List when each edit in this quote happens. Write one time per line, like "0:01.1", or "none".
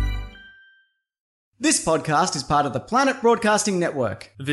0:01.5